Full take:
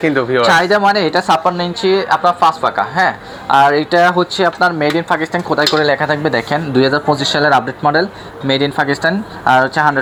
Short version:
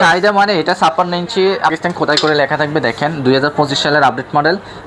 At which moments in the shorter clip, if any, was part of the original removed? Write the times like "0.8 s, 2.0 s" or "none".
1.7 s